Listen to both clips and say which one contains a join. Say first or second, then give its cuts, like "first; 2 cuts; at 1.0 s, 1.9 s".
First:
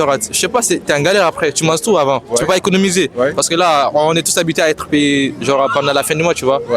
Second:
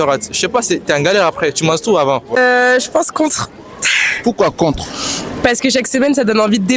second; 1 cut; at 2.3 s